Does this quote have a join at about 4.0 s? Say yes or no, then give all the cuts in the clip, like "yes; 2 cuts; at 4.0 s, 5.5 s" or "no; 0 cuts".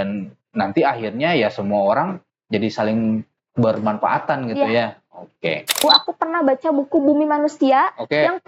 no; 1 cut; at 5.8 s